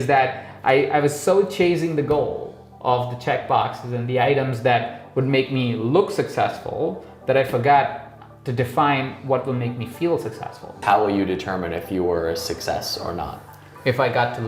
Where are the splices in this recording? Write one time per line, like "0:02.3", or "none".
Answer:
0:10.8